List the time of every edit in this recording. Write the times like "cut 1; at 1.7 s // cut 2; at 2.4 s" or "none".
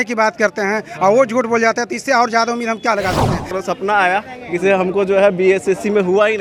cut 1; at 3.5 s

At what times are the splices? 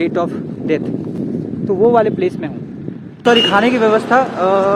cut 1; at 3.2 s

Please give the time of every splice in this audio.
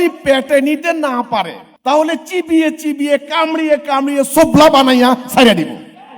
cut 1; at 1.6 s

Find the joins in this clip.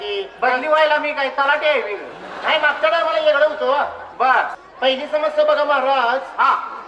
cut 1; at 4.6 s

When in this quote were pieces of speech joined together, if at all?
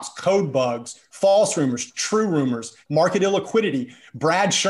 cut 1; at 1.2 s // cut 2; at 2.7 s

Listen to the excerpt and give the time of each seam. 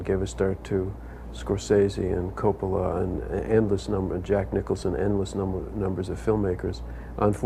cut 1; at 1.3 s

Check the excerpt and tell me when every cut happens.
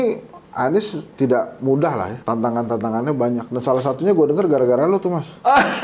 cut 1; at 1.0 s // cut 2; at 2.1 s

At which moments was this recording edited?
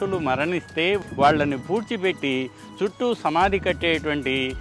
cut 1; at 1.0 s

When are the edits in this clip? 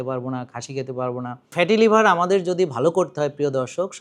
cut 1; at 1.5 s

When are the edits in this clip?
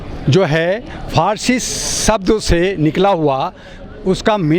none

